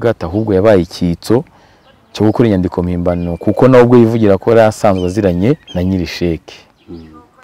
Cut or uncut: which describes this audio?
cut